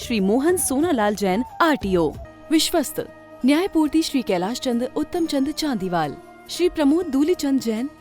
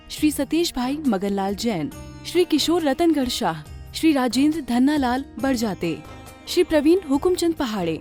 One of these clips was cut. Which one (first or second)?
first